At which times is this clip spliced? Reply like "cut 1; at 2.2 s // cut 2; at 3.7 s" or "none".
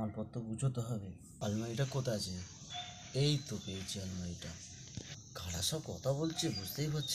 cut 1; at 1.2 s